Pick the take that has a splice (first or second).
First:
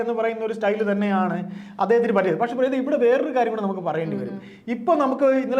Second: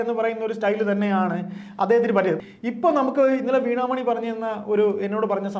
second